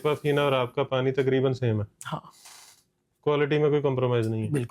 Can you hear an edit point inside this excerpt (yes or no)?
no